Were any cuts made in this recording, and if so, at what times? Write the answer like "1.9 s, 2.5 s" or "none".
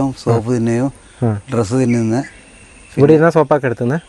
none

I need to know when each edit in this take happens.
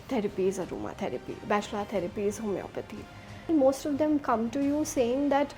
3.4 s

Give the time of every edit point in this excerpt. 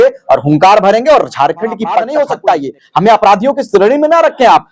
2.1 s

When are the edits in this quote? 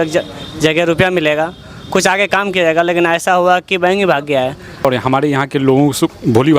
4.8 s

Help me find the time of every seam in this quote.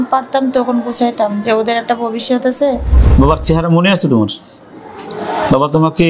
2.9 s

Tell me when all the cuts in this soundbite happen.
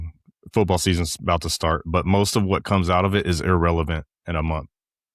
none

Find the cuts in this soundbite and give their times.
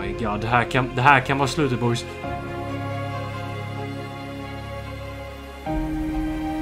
2.0 s

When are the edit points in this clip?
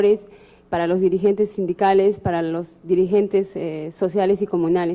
none

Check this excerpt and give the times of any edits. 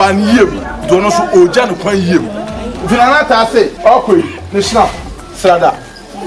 3.7 s

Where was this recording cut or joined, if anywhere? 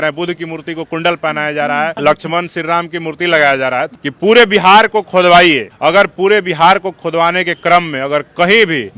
1.9 s, 3.9 s, 5.7 s

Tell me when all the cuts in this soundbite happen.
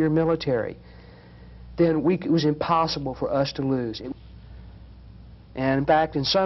4.0 s

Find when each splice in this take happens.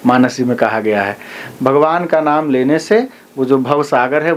none

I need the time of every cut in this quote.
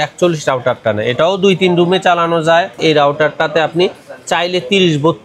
2.8 s

